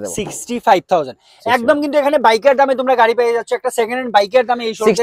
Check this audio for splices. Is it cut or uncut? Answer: uncut